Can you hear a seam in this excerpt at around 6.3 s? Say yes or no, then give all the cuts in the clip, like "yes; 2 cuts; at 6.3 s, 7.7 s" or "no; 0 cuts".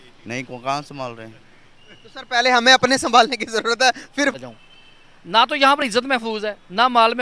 no; 1 cut; at 4.3 s